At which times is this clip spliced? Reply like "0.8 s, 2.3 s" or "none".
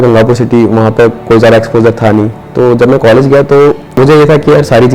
4.0 s